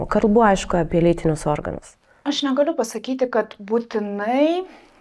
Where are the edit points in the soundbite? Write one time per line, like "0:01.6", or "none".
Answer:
none

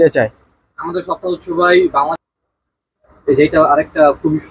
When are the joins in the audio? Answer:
0:02.3

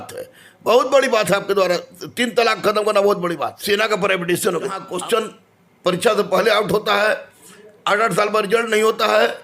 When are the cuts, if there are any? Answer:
0:03.5
0:04.8

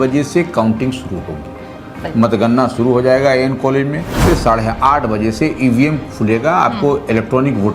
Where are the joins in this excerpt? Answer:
0:04.2

